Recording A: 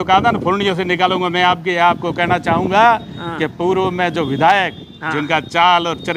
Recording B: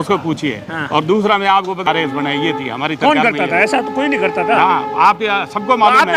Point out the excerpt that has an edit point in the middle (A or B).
B